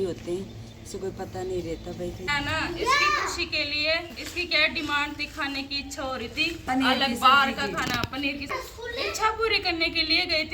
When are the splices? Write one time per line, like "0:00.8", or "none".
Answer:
0:02.3
0:08.5